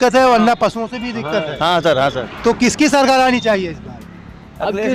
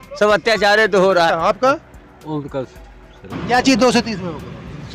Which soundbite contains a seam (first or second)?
second